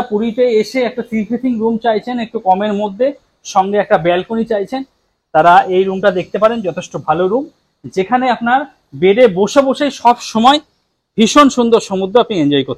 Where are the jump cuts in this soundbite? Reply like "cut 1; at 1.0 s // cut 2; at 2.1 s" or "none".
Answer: none

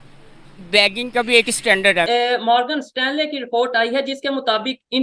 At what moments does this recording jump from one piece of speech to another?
cut 1; at 2.1 s

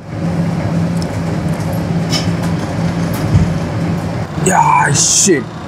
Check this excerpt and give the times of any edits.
cut 1; at 4.2 s

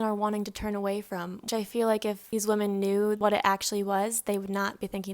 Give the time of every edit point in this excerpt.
cut 1; at 3.2 s

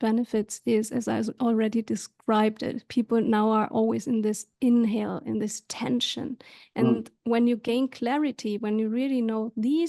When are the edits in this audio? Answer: none

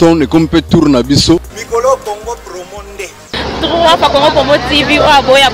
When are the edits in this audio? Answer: cut 1; at 1.6 s

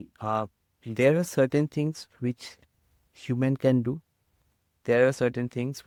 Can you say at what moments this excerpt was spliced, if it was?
none

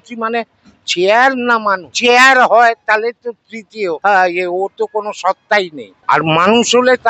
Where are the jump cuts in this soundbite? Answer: cut 1; at 1.9 s // cut 2; at 4.0 s // cut 3; at 5.9 s

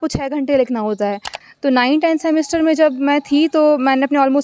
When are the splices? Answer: cut 1; at 1.3 s

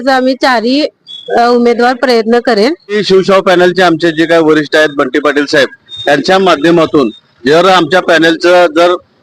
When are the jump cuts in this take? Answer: cut 1; at 3.0 s

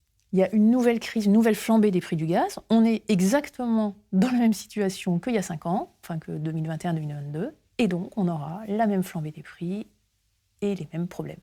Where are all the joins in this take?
none

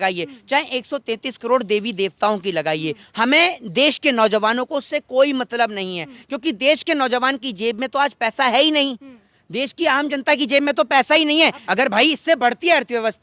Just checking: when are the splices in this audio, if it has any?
cut 1; at 11.6 s

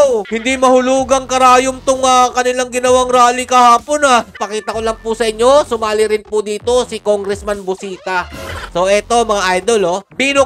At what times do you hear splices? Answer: cut 1; at 4.4 s // cut 2; at 8.7 s

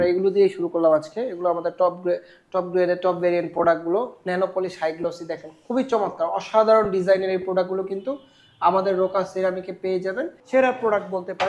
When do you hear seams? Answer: cut 1; at 10.4 s

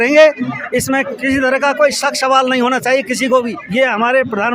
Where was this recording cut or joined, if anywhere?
cut 1; at 3.6 s

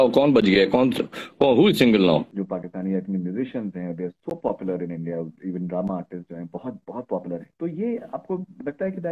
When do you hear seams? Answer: cut 1; at 2.4 s // cut 2; at 7.5 s

